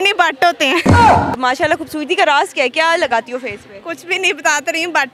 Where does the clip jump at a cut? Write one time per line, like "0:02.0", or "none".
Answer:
0:01.4